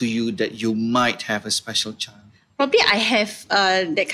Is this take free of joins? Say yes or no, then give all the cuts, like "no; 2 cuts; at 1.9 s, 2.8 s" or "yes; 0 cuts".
yes; 0 cuts